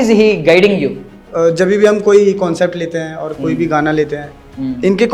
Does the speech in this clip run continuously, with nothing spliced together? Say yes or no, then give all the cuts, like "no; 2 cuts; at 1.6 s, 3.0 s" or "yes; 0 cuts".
no; 1 cut; at 1.2 s